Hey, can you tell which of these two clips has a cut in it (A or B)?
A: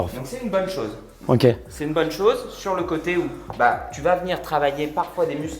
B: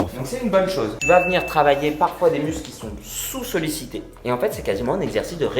B